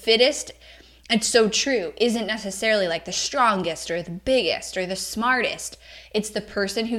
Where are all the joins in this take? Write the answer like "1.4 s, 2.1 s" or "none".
none